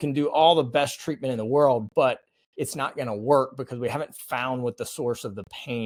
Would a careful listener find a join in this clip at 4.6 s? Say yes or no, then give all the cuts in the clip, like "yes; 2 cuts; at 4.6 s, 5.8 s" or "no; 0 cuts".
no; 0 cuts